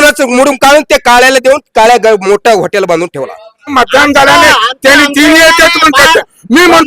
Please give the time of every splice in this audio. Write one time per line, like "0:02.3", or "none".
0:03.7